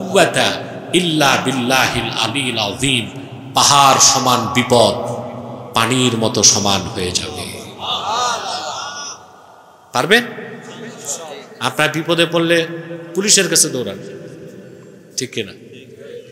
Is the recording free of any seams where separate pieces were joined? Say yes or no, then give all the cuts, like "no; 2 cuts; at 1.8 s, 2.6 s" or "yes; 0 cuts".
yes; 0 cuts